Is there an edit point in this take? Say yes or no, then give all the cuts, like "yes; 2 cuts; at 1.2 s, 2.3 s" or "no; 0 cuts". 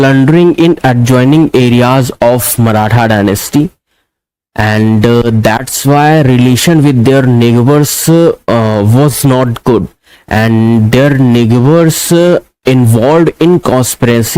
no; 0 cuts